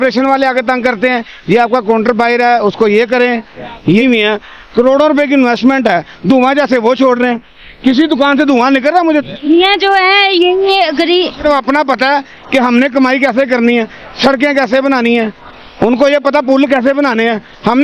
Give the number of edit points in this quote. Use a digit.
2